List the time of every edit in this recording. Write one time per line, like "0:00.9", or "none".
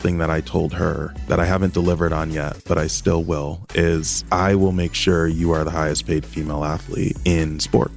0:01.1
0:04.1
0:07.2